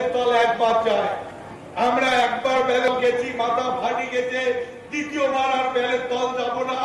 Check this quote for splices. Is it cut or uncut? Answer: cut